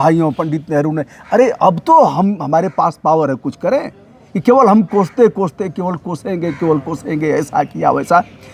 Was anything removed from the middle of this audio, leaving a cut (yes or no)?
no